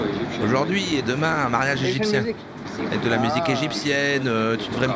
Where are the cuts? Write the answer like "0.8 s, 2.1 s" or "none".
2.7 s

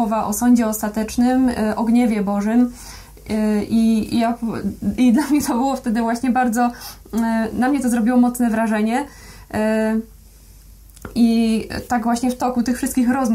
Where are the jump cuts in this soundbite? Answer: none

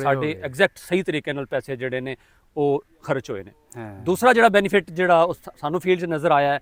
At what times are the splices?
none

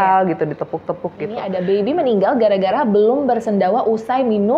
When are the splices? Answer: 1.5 s

